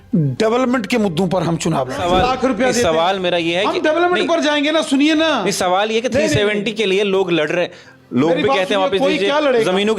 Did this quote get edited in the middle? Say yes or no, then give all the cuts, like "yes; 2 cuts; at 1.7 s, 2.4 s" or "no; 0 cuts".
yes; 1 cut; at 2.0 s